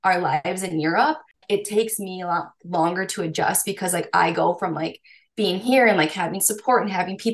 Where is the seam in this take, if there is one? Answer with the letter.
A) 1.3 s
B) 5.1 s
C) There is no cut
A